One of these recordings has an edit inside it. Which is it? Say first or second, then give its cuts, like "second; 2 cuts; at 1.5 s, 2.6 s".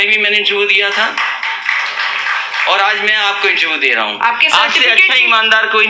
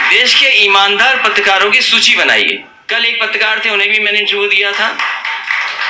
second; 1 cut; at 2.7 s